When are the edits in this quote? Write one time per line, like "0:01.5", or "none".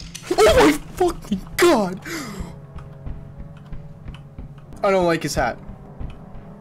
0:04.7